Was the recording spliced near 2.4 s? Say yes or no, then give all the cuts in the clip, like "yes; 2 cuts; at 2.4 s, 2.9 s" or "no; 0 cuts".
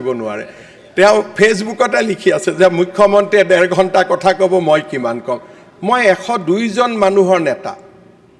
no; 0 cuts